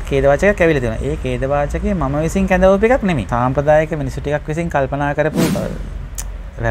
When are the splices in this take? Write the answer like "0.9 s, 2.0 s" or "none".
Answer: 3.2 s, 5.5 s

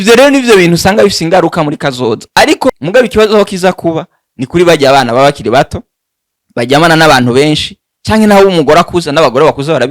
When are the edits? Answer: 2.8 s

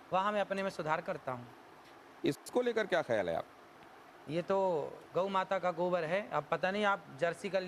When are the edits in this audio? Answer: none

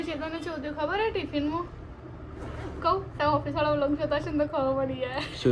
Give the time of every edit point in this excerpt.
none

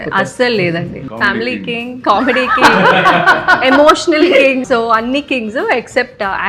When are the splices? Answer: 1.0 s, 4.6 s

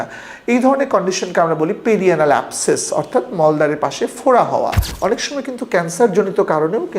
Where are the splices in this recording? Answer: 4.9 s

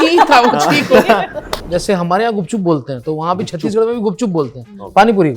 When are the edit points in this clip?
1.6 s

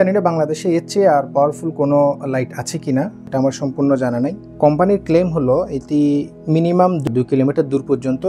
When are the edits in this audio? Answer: 4.4 s

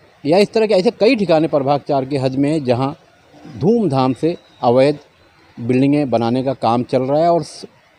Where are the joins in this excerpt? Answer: none

